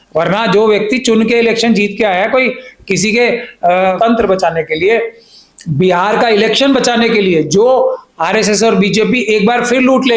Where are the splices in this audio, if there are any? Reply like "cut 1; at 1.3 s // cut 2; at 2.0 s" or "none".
cut 1; at 4.0 s